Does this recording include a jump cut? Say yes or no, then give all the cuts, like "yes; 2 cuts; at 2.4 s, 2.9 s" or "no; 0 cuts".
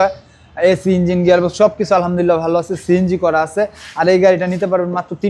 no; 0 cuts